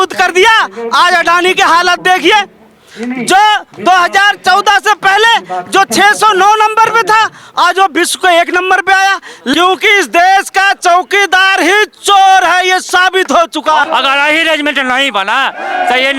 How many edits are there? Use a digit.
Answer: 2